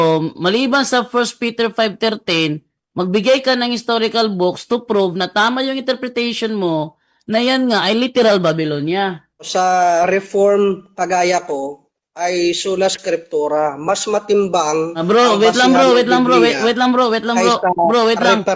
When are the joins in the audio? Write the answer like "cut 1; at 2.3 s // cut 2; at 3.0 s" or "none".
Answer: cut 1; at 9.5 s